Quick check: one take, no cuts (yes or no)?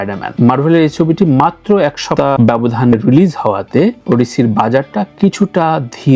yes